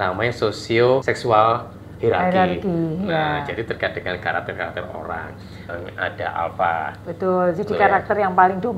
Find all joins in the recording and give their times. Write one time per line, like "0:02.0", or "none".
0:01.1
0:05.7